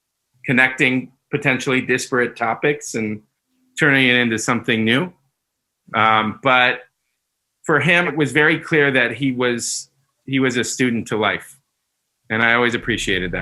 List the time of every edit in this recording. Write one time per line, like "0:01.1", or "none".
0:08.1